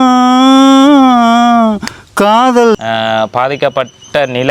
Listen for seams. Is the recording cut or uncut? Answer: cut